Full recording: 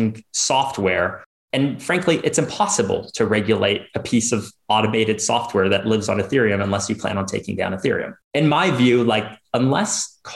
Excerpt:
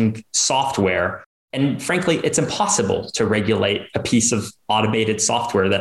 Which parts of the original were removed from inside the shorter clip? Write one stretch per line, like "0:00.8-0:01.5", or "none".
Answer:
none